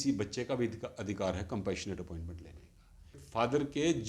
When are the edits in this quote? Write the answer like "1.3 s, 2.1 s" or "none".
3.2 s